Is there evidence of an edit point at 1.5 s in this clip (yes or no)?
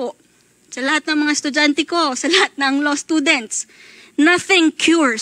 no